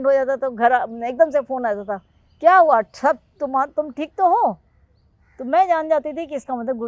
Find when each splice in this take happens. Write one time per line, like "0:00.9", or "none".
none